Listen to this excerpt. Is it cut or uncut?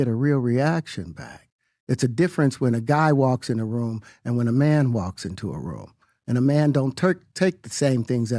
uncut